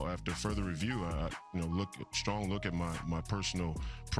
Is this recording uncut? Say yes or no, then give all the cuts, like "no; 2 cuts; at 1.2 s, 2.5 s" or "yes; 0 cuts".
yes; 0 cuts